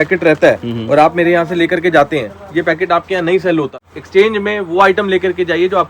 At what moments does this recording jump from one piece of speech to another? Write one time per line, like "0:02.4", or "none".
0:03.8